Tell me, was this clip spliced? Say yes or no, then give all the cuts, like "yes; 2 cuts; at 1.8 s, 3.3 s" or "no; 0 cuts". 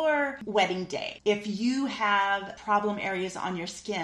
yes; 2 cuts; at 1.0 s, 2.5 s